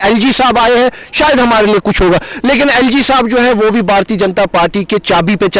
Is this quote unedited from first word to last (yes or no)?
yes